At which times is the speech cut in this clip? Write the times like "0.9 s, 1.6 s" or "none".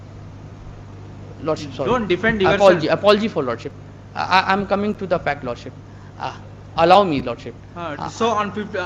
none